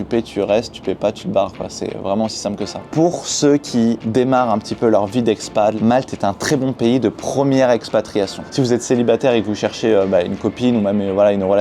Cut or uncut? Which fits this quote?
cut